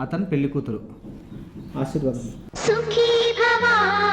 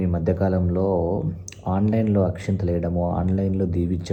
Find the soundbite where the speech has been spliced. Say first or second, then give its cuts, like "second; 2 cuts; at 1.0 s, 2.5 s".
first; 1 cut; at 2.4 s